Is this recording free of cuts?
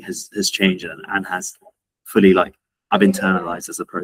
yes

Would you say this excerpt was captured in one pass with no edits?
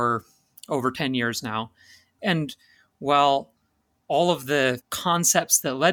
no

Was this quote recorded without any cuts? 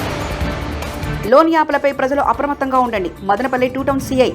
no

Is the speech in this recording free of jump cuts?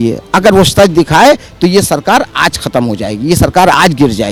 yes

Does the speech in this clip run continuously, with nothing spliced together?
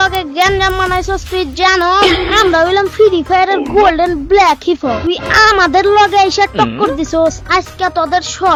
yes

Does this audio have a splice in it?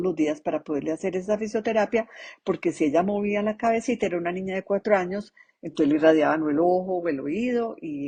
no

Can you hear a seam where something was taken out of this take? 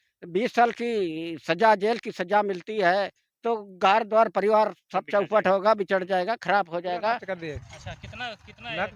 yes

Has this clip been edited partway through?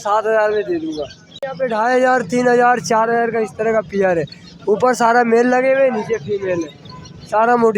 yes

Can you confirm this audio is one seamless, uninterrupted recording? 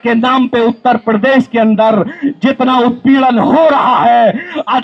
yes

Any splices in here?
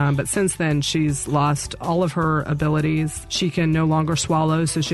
yes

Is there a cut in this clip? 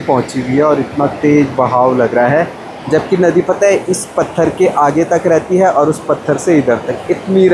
no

